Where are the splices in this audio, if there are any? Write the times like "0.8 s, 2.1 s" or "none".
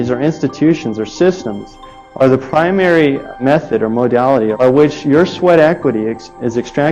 3.3 s, 4.5 s